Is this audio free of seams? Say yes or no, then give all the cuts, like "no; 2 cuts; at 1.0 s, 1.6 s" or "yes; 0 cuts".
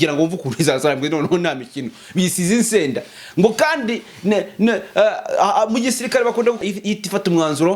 no; 1 cut; at 6.6 s